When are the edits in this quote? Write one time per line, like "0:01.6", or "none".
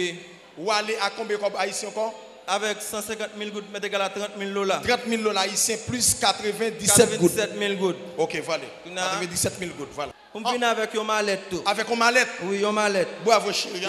0:10.1